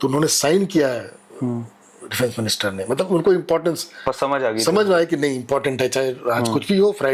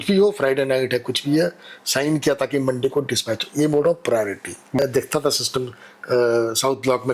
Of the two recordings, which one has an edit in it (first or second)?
second